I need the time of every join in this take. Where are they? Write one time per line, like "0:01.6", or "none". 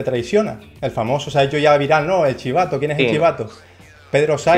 none